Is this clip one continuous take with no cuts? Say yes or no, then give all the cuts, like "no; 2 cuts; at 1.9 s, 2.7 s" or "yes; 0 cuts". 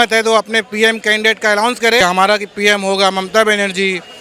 no; 1 cut; at 2.0 s